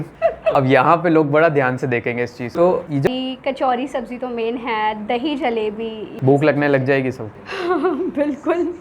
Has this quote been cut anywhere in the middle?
yes; 1 cut; at 3.1 s

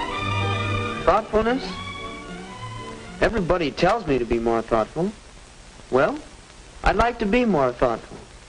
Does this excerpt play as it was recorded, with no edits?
no; 1 cut; at 3.6 s

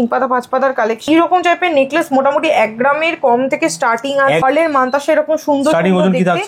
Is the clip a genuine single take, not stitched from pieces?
no; 2 cuts; at 1.1 s, 4.4 s

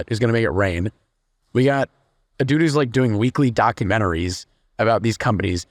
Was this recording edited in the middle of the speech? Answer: no; 0 cuts

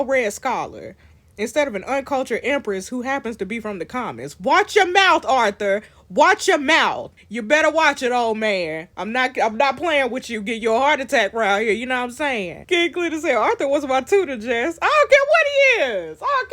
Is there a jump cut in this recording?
yes; 2 cuts; at 7.1 s, 12.5 s

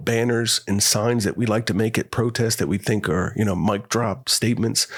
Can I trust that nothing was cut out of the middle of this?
yes; 0 cuts

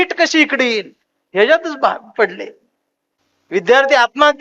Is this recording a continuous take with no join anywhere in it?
yes; 0 cuts

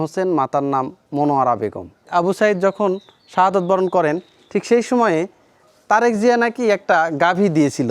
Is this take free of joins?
no; 1 cut; at 2.1 s

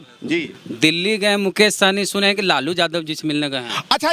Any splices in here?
no; 0 cuts

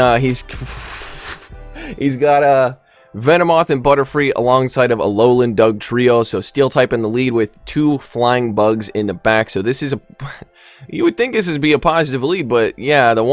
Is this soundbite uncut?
yes; 0 cuts

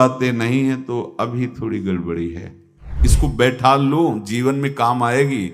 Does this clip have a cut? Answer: yes; 1 cut; at 2.9 s

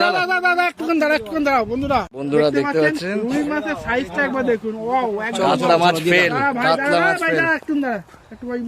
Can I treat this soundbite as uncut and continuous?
no; 1 cut; at 2.2 s

